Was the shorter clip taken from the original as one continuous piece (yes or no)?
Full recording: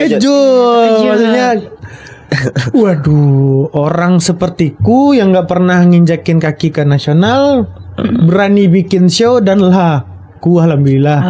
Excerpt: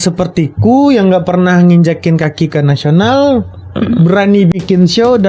yes